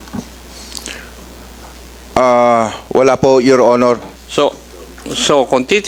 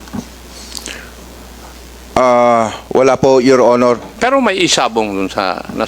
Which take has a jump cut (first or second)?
second